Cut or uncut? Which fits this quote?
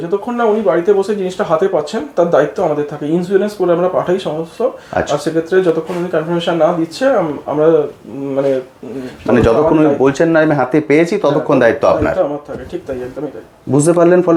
uncut